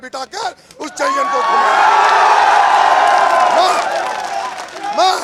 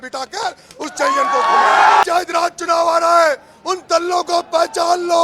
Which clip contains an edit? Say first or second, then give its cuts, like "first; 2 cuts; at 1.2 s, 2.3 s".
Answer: second; 1 cut; at 2.0 s